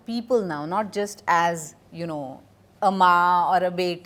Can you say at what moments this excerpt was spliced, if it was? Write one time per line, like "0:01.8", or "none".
none